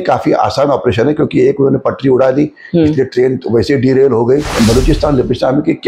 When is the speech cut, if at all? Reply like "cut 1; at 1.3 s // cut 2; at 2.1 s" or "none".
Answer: cut 1; at 4.5 s